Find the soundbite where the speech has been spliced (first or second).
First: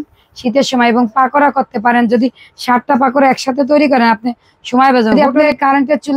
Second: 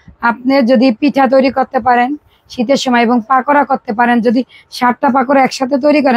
first